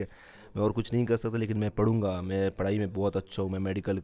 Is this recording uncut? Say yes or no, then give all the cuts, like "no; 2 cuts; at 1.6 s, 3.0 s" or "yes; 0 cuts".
yes; 0 cuts